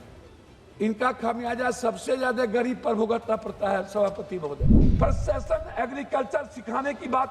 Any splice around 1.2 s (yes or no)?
no